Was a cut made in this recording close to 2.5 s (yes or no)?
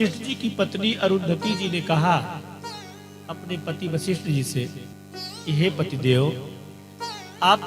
no